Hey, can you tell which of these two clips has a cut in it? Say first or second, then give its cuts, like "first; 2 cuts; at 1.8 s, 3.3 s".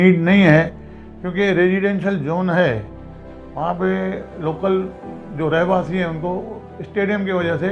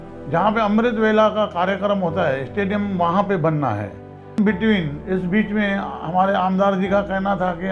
second; 1 cut; at 4.4 s